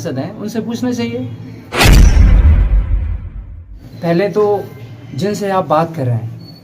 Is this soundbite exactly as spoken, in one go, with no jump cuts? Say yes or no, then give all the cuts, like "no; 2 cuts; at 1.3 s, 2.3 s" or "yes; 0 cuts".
no; 2 cuts; at 1.6 s, 3.8 s